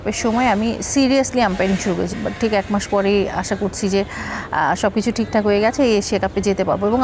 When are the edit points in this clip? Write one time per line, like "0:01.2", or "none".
0:02.1